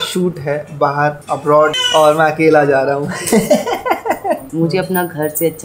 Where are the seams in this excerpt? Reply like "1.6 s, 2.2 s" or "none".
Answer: 4.4 s